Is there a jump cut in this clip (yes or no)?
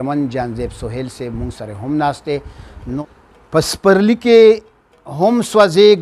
yes